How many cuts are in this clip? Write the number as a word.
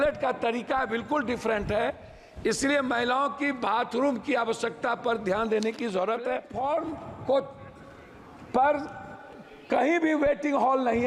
one